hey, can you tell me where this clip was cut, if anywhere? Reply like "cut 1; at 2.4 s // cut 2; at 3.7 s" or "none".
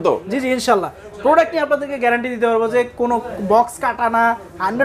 none